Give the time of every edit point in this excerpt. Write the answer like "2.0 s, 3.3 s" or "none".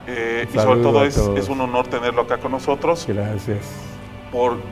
3.0 s

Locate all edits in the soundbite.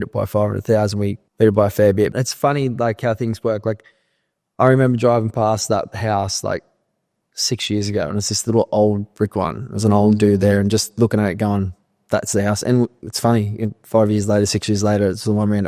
1.2 s, 2.1 s

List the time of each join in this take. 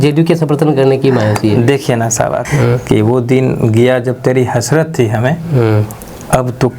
2.4 s

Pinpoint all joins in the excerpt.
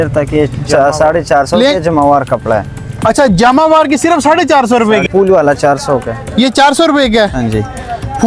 5.0 s

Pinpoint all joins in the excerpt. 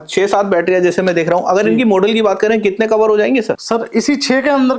3.6 s

